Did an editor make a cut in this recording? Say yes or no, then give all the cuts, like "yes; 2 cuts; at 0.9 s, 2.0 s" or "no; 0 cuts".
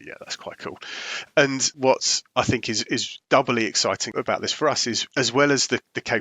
yes; 4 cuts; at 1.7 s, 3.1 s, 4.1 s, 5.0 s